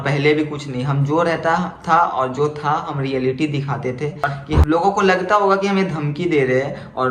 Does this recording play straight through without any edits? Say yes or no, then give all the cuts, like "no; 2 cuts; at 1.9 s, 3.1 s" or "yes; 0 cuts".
no; 1 cut; at 4.6 s